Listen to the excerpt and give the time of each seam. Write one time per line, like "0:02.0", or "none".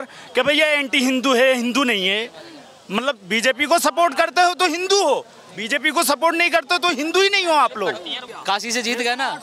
0:08.3